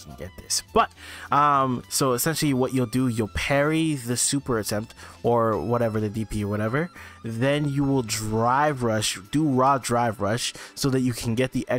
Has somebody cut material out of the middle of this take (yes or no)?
no